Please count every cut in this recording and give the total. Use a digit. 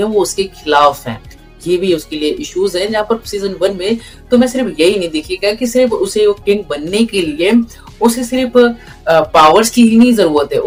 0